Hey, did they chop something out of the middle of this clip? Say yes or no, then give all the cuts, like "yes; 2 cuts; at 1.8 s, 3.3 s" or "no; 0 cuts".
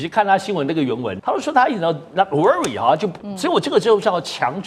yes; 2 cuts; at 1.1 s, 3.1 s